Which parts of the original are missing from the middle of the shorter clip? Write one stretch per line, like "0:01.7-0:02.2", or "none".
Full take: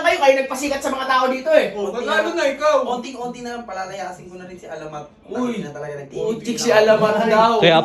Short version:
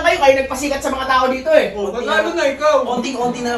none